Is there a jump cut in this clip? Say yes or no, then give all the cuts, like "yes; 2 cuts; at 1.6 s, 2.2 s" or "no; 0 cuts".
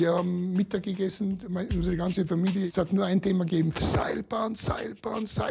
yes; 1 cut; at 2.7 s